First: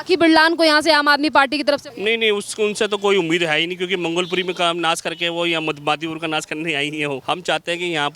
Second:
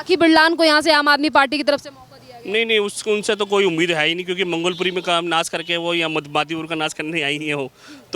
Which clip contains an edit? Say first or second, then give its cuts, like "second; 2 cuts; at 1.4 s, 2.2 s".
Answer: first; 2 cuts; at 1.9 s, 7.2 s